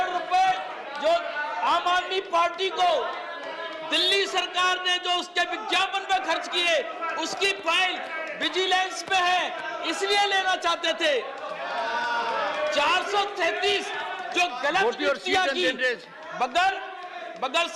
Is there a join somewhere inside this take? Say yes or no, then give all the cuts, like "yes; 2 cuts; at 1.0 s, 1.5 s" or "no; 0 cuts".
no; 0 cuts